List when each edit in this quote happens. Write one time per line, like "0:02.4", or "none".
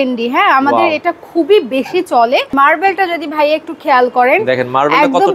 0:02.5